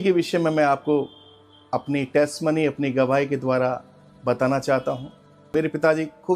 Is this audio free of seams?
no; 1 cut; at 5.5 s

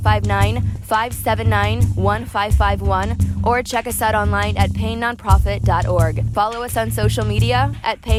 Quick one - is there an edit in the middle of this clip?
no; 0 cuts

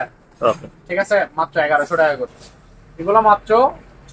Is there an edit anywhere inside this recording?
yes; 1 cut; at 2.3 s

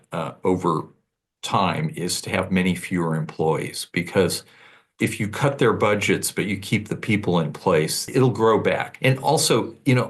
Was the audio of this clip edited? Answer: yes; 3 cuts; at 4.9 s, 8.0 s, 8.9 s

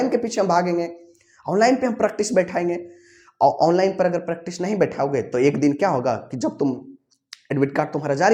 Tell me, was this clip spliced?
no; 0 cuts

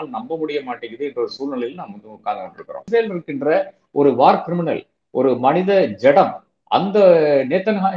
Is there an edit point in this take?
yes; 1 cut; at 2.8 s

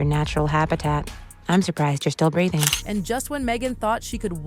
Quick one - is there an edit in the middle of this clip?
no; 0 cuts

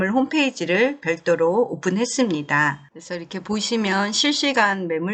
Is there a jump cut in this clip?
no; 0 cuts

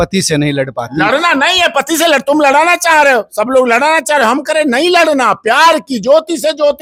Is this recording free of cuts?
yes; 0 cuts

